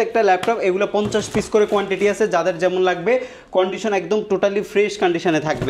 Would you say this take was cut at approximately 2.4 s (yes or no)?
no